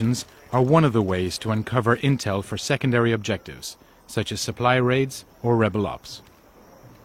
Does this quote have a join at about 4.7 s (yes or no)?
no